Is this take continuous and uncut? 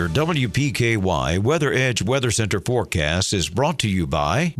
yes; 0 cuts

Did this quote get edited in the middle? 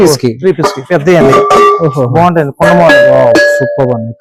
no; 0 cuts

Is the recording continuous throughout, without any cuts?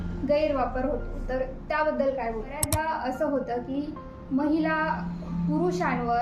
no; 1 cut; at 2.7 s

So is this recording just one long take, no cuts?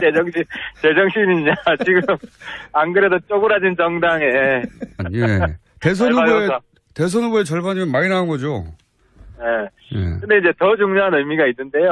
yes; 0 cuts

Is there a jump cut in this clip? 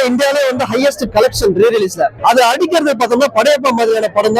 yes; 1 cut; at 2.1 s

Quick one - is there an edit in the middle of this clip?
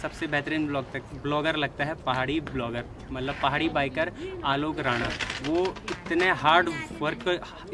no; 0 cuts

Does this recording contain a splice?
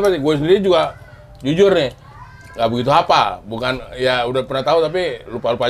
no; 0 cuts

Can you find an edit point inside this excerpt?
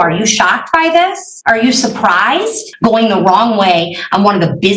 yes; 2 cuts; at 1.3 s, 2.7 s

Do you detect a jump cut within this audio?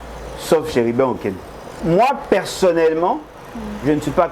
yes; 1 cut; at 1.7 s

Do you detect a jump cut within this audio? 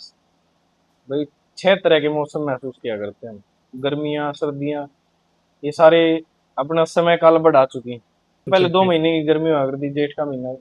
yes; 2 cuts; at 3.7 s, 8.5 s

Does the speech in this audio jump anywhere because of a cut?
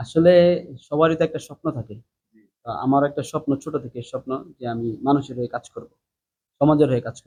no; 0 cuts

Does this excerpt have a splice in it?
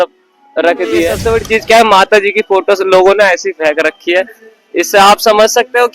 yes; 1 cut; at 1.2 s

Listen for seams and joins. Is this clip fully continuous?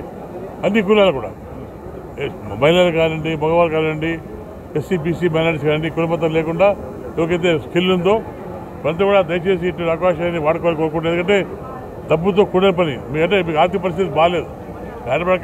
yes; 0 cuts

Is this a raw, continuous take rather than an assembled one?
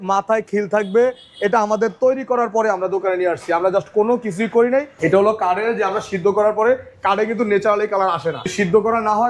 no; 2 cuts; at 4.9 s, 8.5 s

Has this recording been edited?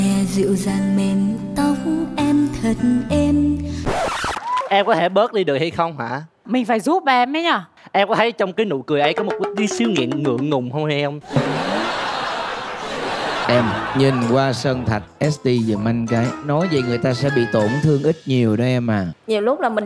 yes; 2 cuts; at 4.2 s, 13.4 s

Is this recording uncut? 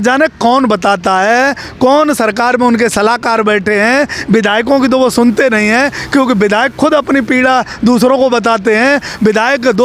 yes; 0 cuts

